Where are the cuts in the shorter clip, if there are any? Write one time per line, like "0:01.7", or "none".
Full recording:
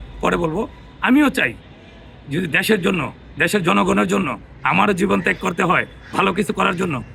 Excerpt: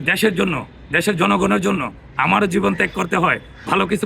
none